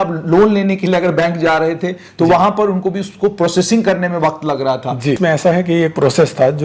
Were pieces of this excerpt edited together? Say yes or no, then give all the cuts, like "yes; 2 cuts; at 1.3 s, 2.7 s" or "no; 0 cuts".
yes; 1 cut; at 5.2 s